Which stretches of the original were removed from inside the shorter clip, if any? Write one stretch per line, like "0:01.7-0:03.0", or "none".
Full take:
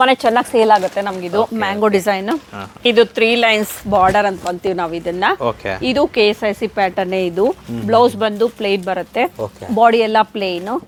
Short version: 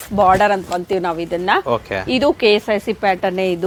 none